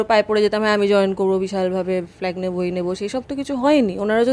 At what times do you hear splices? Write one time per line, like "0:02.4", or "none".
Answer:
none